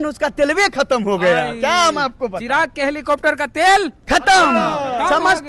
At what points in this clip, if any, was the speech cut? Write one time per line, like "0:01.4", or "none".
none